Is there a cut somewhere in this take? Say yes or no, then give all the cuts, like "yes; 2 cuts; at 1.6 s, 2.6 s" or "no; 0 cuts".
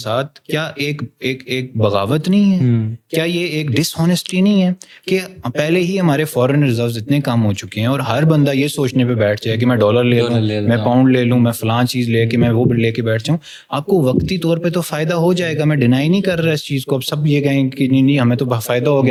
no; 0 cuts